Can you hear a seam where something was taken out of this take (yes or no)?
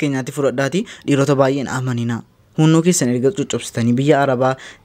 no